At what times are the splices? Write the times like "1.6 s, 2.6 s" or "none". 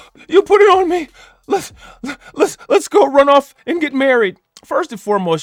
none

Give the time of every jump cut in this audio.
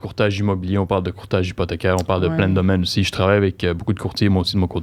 none

